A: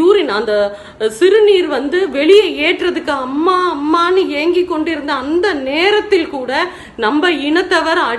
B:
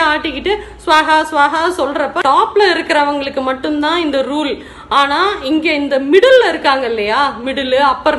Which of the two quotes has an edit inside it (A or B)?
B